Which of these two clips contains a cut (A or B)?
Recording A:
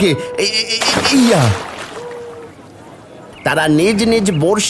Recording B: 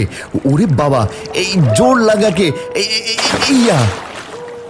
A